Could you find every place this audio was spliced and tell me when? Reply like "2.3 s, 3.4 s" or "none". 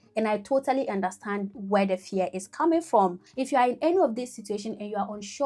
3.3 s